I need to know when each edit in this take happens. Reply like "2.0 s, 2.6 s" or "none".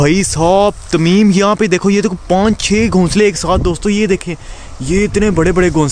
none